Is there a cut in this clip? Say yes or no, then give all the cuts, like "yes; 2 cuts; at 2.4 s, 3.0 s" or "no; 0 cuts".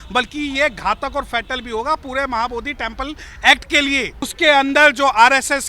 yes; 1 cut; at 4.3 s